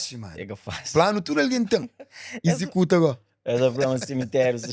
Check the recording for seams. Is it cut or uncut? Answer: uncut